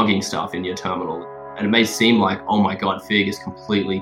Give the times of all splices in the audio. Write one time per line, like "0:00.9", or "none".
0:01.5

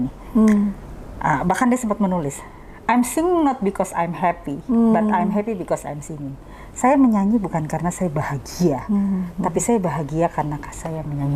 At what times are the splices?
none

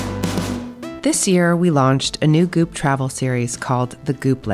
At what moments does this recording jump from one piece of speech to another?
0:00.9

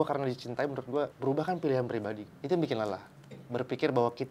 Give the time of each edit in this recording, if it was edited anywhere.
0:01.1
0:02.3

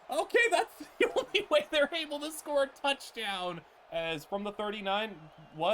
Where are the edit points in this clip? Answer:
0:03.7

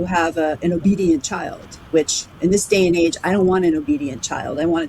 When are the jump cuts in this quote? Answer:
0:02.3

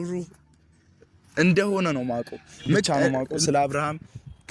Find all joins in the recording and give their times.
0:02.9

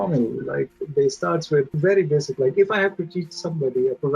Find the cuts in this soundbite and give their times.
0:01.8

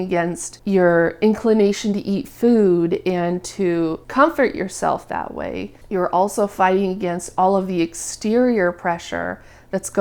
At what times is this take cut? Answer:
none

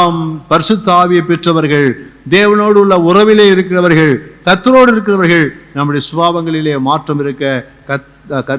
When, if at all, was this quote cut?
none

